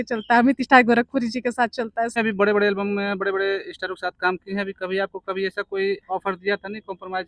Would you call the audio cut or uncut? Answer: cut